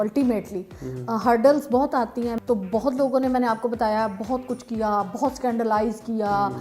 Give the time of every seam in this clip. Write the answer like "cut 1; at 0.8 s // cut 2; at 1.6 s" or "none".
cut 1; at 2.3 s